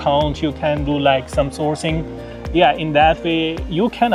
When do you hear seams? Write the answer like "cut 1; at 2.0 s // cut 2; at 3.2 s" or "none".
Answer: none